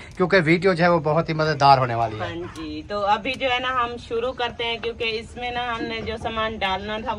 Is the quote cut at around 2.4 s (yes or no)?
no